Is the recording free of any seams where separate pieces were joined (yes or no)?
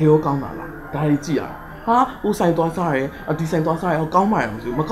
yes